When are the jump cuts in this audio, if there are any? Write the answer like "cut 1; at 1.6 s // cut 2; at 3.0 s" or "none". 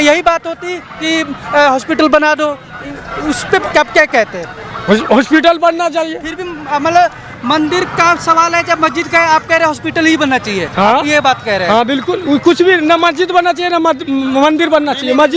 none